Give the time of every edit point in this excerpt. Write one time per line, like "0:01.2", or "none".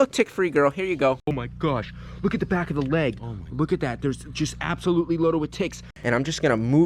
0:01.4
0:05.9